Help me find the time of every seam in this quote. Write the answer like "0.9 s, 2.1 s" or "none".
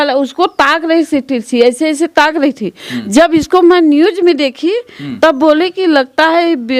none